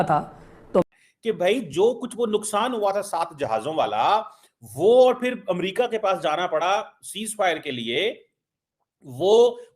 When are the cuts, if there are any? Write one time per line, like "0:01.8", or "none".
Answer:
0:00.9

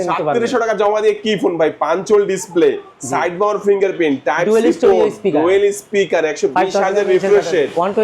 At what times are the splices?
none

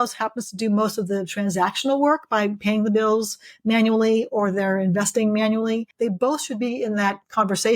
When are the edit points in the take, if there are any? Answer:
0:05.9

